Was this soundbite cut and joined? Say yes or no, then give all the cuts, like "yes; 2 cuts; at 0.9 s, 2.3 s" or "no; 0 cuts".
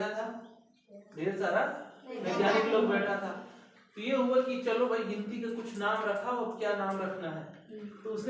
no; 0 cuts